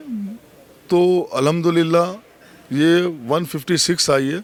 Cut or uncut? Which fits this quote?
uncut